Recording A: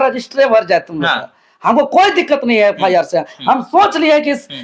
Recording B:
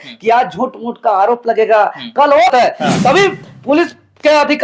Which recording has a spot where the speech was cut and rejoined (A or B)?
B